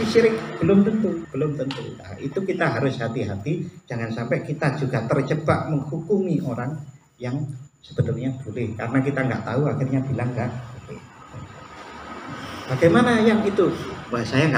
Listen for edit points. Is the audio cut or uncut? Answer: cut